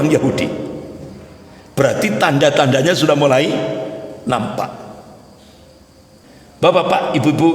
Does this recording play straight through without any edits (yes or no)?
no